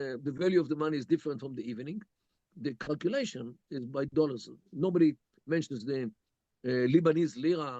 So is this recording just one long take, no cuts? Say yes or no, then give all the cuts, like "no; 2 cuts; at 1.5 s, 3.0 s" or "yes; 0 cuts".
no; 1 cut; at 2.4 s